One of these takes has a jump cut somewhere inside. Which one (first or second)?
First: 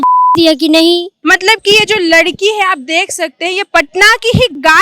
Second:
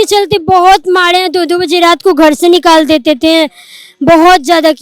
first